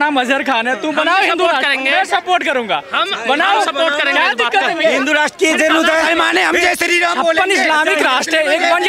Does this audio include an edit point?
no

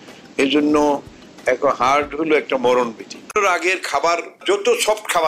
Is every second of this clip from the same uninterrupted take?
no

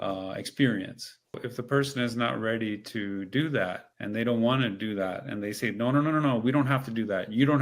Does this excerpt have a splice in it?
yes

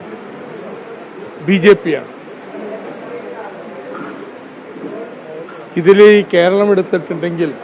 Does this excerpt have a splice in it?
no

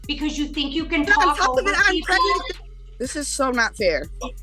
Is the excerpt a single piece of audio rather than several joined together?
no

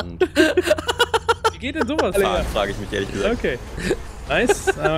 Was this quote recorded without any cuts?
no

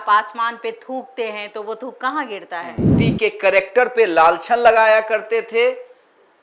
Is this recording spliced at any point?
yes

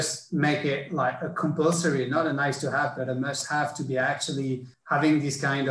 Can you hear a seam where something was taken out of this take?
yes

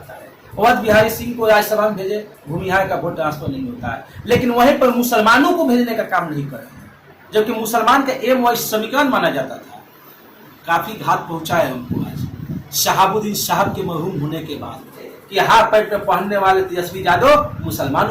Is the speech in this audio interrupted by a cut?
yes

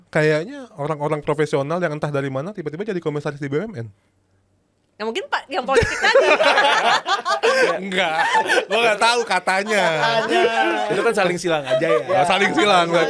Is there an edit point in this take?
no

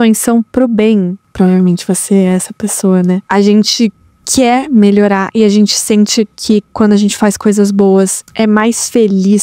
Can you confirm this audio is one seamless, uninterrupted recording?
no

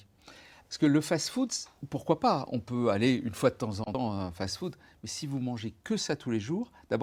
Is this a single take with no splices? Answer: no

